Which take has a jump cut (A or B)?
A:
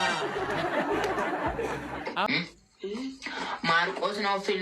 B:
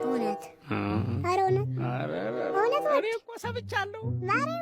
A